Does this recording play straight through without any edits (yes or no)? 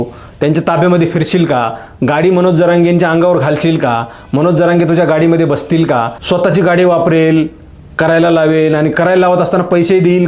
no